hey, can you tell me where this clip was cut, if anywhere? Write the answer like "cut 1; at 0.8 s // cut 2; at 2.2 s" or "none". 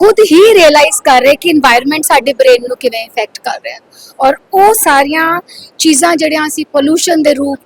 none